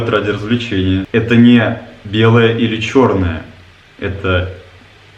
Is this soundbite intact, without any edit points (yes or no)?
no